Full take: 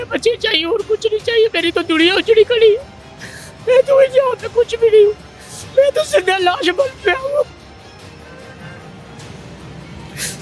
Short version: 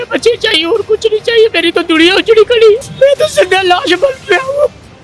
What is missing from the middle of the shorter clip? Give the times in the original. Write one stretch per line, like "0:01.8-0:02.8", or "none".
0:02.9-0:05.6